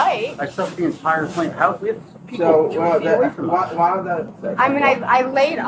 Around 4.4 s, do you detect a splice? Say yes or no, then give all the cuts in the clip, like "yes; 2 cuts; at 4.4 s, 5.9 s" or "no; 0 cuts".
yes; 1 cut; at 4.4 s